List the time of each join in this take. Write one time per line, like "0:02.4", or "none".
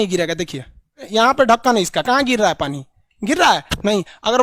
0:01.0